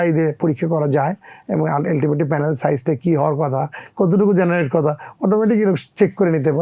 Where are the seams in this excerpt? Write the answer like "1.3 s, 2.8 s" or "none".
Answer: none